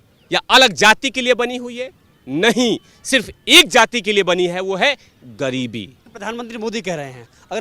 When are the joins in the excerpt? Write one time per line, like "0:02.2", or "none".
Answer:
0:06.0